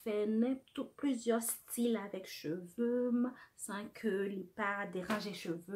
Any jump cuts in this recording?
no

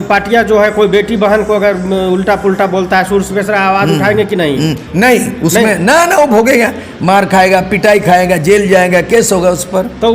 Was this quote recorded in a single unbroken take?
yes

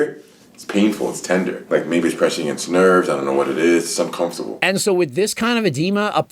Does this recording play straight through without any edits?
no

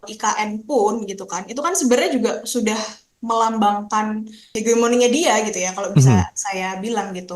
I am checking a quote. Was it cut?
yes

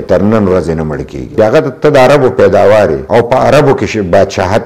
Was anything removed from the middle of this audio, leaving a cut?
yes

